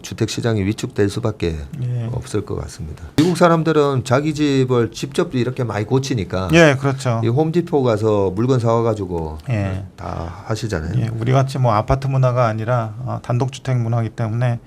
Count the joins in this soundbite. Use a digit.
1